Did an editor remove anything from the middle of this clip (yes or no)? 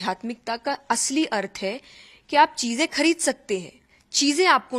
no